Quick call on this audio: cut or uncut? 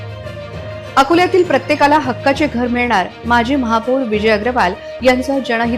uncut